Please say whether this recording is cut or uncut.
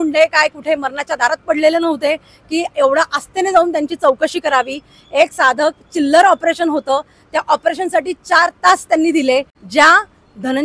cut